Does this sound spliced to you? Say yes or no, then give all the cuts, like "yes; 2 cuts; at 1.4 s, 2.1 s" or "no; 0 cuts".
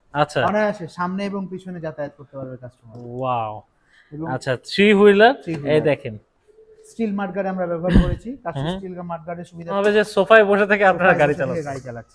yes; 1 cut; at 9.8 s